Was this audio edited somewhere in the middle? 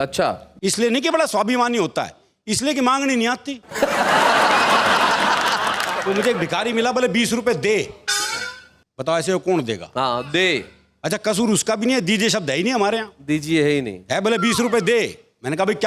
no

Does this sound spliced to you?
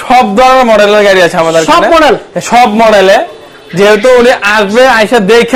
no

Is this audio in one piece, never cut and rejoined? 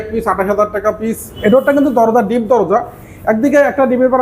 no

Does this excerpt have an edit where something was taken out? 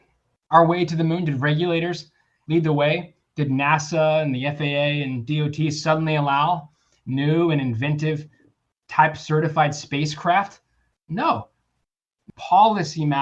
yes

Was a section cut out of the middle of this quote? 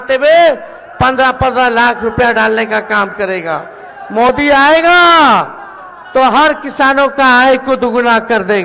no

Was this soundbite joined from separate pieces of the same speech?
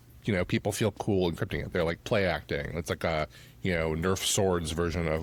no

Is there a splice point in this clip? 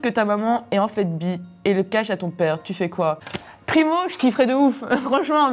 no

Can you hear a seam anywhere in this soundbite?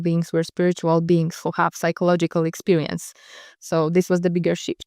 no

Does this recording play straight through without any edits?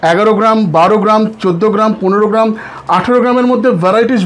yes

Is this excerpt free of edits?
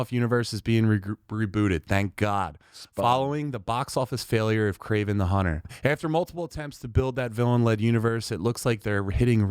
no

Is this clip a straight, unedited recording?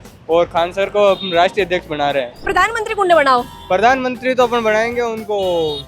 no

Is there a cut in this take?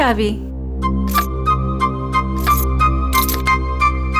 no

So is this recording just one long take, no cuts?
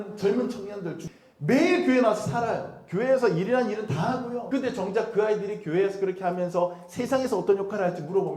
no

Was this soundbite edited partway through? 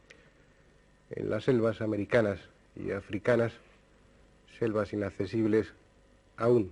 no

